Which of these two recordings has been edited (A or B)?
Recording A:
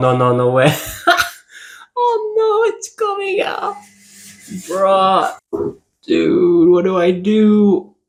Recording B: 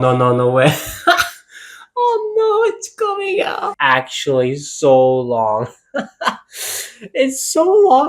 B